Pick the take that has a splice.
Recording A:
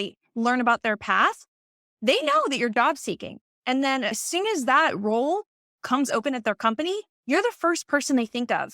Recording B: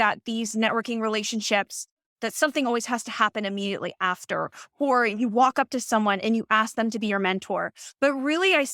A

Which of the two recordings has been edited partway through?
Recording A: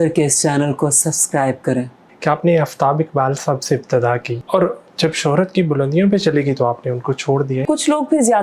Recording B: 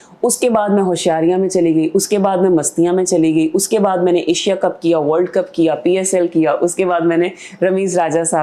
A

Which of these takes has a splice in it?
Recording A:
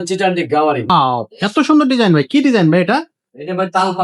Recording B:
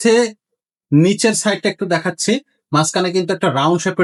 A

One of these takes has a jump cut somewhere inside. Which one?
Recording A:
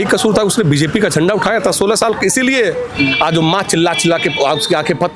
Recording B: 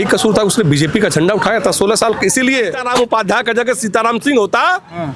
B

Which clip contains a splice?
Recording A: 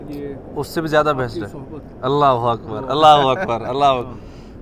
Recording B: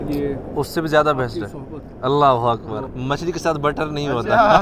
B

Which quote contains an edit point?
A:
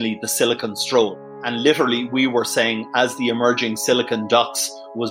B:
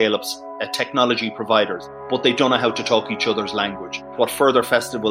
B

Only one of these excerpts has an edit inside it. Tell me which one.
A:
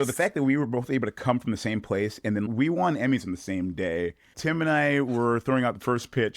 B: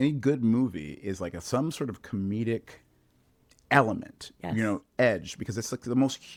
A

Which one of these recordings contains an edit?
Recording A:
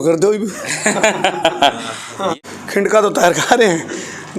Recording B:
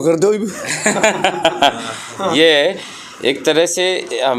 A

